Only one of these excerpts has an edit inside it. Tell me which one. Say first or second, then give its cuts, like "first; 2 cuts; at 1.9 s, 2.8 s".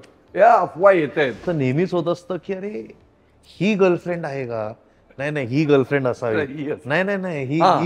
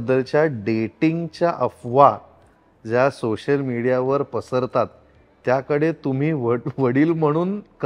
first; 1 cut; at 1.5 s